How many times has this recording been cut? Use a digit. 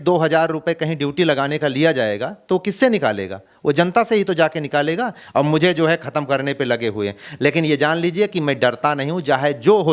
1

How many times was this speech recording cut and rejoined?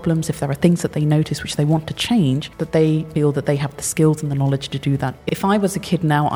2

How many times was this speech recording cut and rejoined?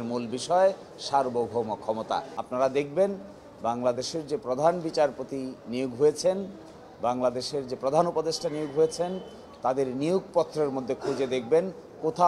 1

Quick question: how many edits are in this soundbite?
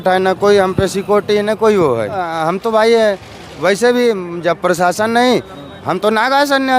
1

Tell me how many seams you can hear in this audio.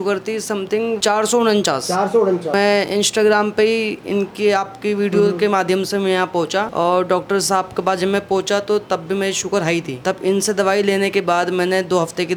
0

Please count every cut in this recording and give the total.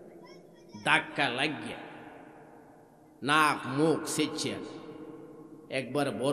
0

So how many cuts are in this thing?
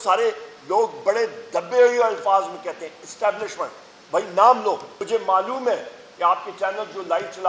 1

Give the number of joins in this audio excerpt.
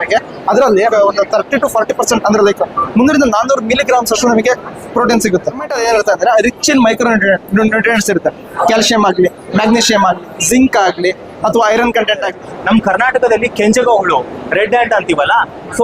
3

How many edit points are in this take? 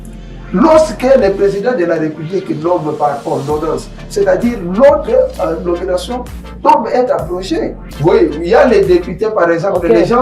1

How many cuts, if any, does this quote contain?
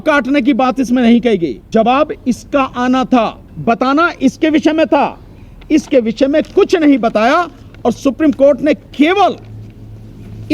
2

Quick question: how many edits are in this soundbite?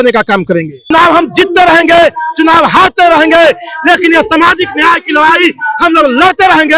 1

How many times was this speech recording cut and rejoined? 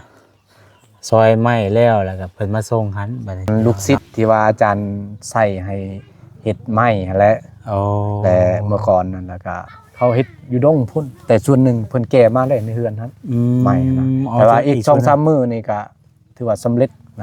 1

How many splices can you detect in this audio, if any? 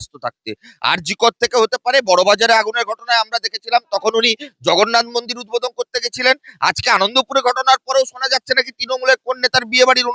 0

